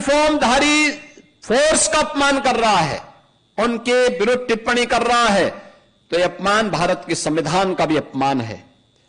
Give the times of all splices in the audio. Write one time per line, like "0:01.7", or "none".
none